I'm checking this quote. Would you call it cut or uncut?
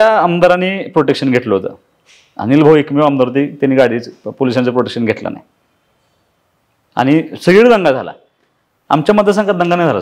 uncut